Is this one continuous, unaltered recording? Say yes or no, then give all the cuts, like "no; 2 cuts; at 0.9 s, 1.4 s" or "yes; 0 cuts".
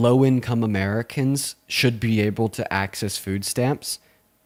yes; 0 cuts